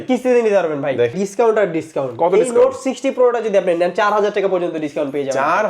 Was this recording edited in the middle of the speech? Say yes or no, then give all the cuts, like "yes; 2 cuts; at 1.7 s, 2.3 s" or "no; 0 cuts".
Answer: yes; 1 cut; at 1.1 s